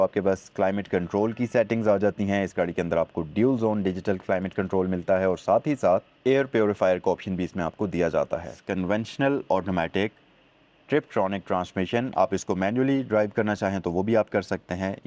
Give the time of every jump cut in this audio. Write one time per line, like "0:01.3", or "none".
0:08.6